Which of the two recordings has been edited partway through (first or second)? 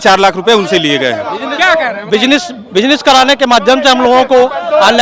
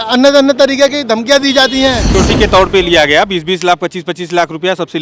second